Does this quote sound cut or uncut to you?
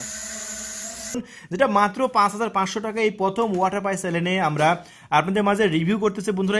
cut